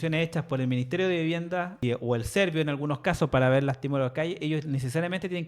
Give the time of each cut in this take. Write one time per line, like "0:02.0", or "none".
0:01.8